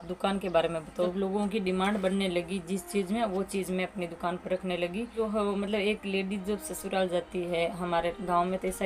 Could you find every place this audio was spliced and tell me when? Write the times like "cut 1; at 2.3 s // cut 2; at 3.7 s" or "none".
cut 1; at 1.1 s // cut 2; at 5.1 s